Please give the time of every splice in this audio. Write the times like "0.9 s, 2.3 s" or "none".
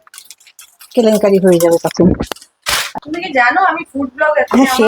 2.9 s